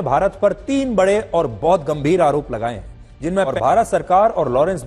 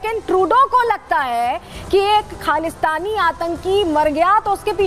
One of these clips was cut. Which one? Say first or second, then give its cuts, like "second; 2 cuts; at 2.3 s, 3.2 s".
first; 1 cut; at 3.5 s